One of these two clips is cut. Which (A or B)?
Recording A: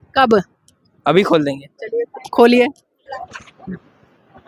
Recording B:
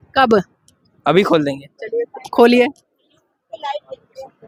A